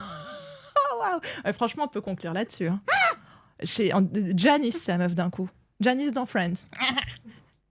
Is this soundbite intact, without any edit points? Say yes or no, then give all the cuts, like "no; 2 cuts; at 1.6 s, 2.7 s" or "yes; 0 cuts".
yes; 0 cuts